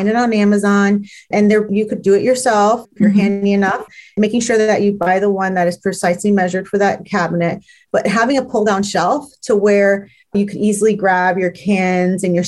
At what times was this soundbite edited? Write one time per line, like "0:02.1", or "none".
0:10.3